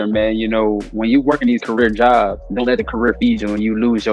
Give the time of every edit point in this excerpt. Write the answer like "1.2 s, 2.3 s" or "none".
0.9 s, 2.4 s